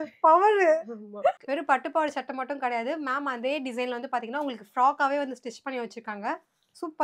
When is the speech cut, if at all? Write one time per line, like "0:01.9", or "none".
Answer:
0:01.4